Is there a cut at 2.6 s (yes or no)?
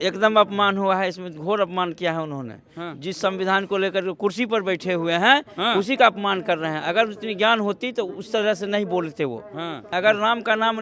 no